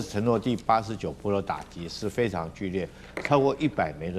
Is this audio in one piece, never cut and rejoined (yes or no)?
yes